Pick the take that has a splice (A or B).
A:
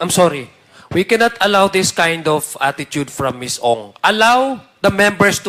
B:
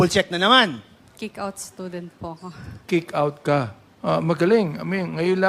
B